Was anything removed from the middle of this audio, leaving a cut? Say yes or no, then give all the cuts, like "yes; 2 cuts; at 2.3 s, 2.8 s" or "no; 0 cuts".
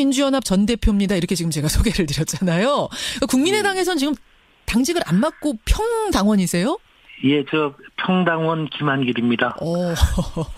no; 0 cuts